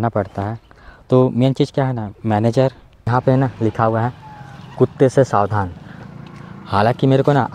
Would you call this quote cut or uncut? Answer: cut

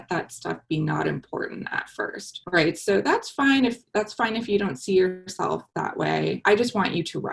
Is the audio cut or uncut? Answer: cut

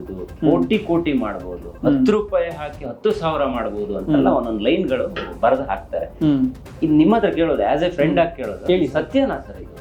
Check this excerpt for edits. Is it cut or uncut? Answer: uncut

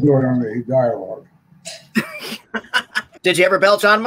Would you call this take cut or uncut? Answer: cut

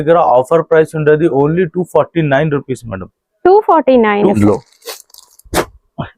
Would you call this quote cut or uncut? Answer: cut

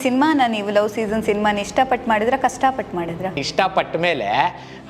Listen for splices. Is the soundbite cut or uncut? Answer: cut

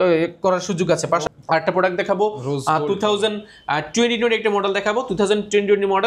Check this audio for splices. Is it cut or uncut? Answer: cut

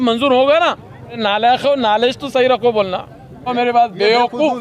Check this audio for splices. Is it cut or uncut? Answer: cut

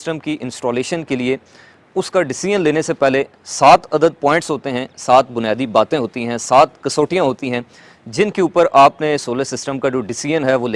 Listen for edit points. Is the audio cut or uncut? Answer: uncut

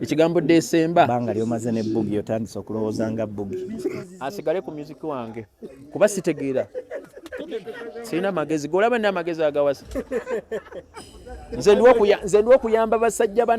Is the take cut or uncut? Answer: cut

